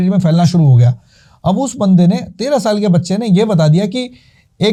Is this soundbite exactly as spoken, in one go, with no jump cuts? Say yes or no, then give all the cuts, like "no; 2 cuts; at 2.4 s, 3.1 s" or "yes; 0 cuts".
yes; 0 cuts